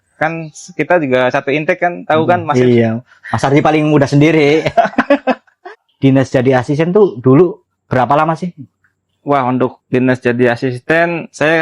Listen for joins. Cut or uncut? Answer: cut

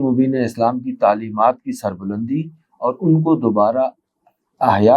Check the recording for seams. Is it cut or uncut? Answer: uncut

